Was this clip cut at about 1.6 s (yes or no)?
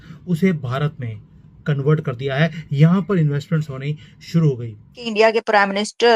no